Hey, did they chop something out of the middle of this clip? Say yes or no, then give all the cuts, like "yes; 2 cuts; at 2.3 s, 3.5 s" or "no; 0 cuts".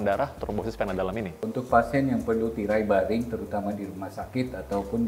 yes; 1 cut; at 1.5 s